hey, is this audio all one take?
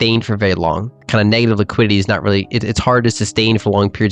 no; 1 cut; at 0.9 s

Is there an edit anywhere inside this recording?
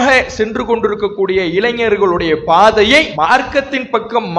yes; 1 cut; at 3.1 s

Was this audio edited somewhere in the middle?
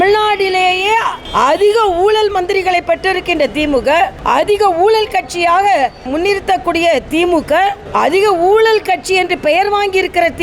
yes; 1 cut; at 6.1 s

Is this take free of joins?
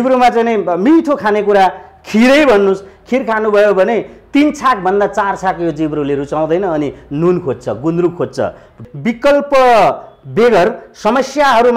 no; 1 cut; at 8.8 s

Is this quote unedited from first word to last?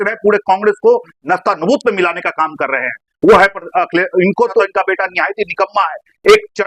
no; 1 cut; at 4.7 s

